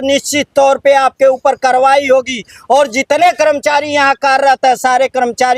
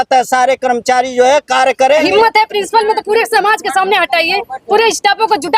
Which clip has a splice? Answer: second; 1 cut; at 2.1 s

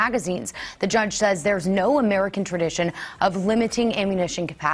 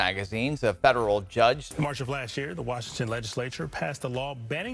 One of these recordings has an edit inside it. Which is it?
second; 1 cut; at 1.7 s

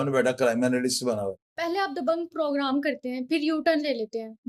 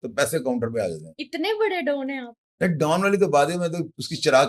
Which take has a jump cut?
first; 1 cut; at 1.5 s

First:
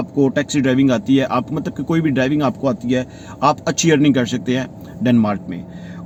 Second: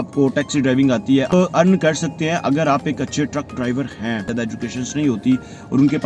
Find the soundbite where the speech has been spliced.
second; 2 cuts; at 1.3 s, 4.3 s

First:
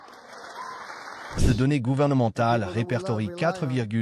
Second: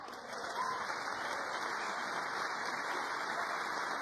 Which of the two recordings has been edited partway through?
first; 1 cut; at 1.4 s

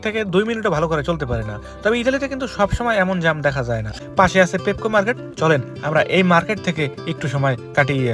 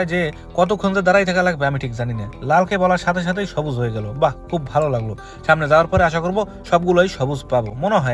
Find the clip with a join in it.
first; 1 cut; at 3.9 s

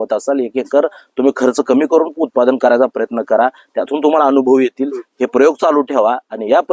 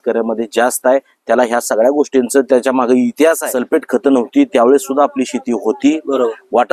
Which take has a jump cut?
second; 1 cut; at 3.5 s

